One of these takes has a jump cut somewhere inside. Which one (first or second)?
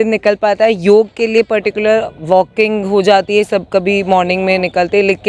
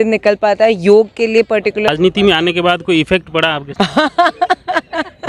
second